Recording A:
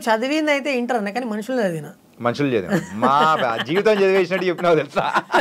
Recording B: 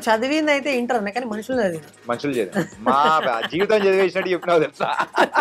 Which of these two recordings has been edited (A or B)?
B